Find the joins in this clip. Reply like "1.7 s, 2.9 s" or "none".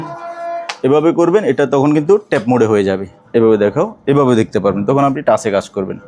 3.2 s